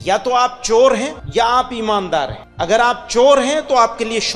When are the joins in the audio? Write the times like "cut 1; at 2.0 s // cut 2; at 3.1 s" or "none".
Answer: cut 1; at 1.2 s // cut 2; at 2.4 s